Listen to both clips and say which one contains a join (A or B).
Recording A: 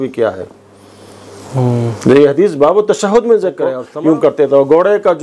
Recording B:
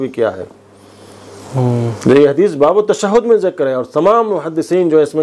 A